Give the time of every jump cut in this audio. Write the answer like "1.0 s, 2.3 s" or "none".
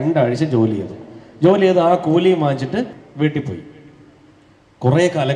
3.0 s